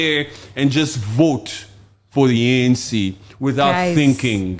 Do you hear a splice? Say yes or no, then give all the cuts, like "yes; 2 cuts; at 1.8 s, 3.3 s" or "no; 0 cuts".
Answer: no; 0 cuts